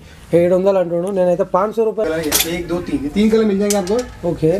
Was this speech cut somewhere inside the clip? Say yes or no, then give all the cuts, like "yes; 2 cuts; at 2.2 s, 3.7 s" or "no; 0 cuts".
yes; 1 cut; at 2.0 s